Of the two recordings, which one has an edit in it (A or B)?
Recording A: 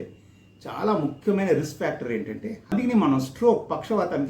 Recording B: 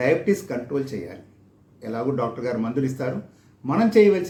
A